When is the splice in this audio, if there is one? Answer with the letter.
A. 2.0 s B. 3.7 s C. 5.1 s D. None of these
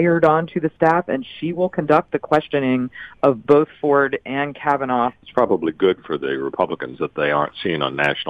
C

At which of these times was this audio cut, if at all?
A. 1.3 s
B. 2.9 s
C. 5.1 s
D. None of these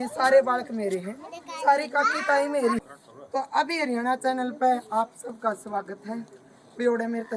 B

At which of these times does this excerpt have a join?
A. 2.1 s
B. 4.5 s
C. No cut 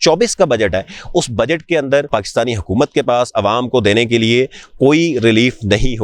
A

